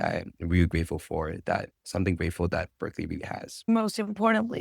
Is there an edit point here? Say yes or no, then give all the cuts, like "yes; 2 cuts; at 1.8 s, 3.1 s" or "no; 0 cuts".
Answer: yes; 1 cut; at 3.7 s